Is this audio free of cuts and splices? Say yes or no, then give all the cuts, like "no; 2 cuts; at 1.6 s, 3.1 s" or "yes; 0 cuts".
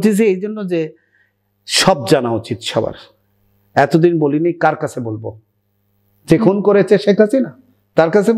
yes; 0 cuts